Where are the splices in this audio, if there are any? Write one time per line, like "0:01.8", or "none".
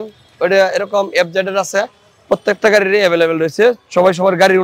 none